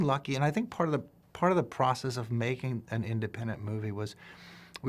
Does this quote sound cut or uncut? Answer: cut